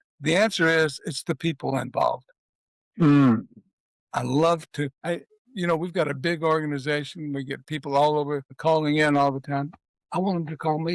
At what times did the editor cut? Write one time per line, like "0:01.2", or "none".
0:05.0
0:08.5